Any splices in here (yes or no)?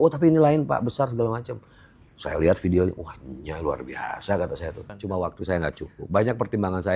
yes